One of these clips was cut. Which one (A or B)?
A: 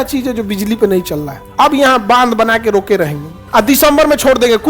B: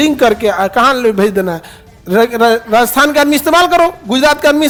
A